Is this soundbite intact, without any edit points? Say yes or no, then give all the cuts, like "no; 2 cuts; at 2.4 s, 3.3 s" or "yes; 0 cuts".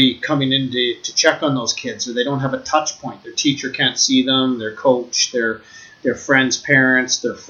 yes; 0 cuts